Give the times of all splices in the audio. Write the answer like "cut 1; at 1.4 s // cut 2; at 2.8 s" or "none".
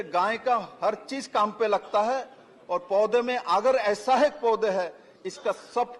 none